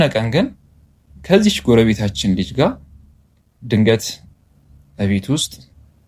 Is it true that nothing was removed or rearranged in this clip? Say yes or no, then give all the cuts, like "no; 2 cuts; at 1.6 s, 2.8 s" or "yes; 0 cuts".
yes; 0 cuts